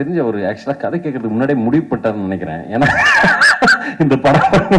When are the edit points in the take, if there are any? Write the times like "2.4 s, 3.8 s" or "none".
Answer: none